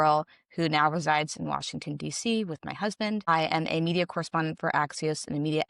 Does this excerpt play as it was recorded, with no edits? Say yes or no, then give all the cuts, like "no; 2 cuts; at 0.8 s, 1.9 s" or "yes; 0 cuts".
no; 1 cut; at 3.3 s